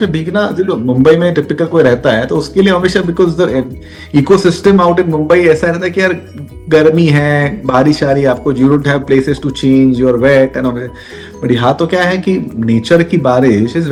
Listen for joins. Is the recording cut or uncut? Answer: uncut